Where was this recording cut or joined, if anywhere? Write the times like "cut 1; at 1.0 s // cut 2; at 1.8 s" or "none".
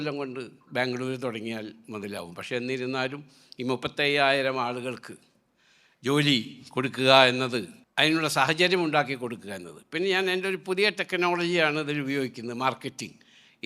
cut 1; at 7.8 s